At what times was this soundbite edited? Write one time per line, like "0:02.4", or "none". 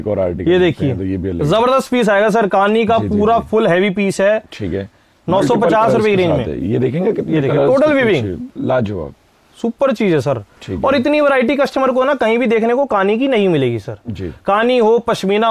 none